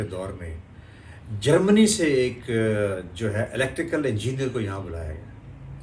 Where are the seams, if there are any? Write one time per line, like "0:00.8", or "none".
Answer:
none